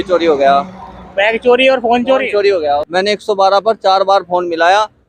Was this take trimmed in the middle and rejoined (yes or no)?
yes